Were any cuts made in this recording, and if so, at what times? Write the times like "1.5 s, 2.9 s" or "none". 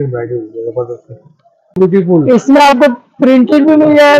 1.8 s